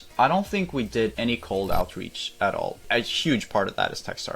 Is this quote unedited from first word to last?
no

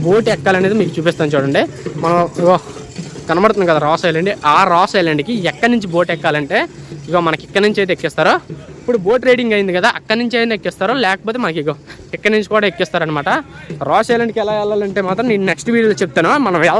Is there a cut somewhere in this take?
no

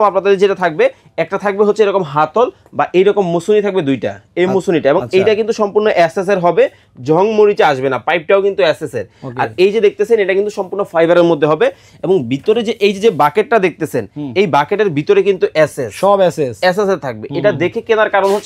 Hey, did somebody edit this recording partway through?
no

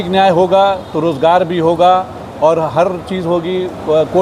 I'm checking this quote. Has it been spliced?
no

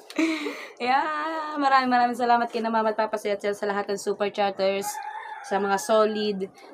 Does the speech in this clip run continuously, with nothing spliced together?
yes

